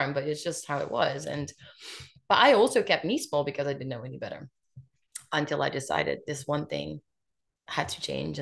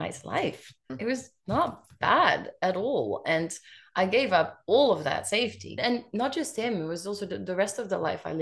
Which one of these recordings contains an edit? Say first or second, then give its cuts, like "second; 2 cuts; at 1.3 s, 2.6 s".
second; 2 cuts; at 0.9 s, 5.8 s